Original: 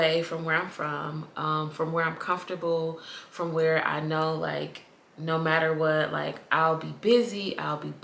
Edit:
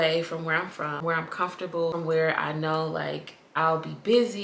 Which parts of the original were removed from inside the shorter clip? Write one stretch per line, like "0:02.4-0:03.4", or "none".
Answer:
0:01.0-0:01.9
0:02.8-0:03.4
0:04.9-0:06.4